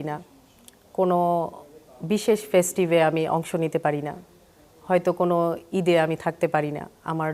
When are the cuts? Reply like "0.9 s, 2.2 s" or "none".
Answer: none